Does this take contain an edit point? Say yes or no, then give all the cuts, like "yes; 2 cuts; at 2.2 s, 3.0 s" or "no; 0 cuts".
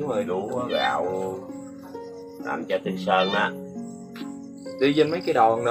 no; 0 cuts